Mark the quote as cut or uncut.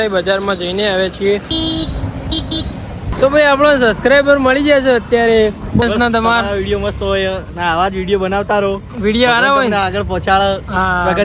cut